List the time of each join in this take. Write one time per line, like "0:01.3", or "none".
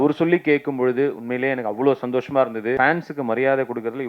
0:02.8